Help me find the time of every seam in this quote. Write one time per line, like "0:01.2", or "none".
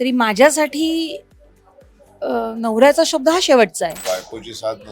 0:04.0